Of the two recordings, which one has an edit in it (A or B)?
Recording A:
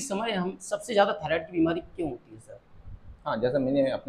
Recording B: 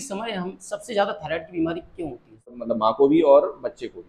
B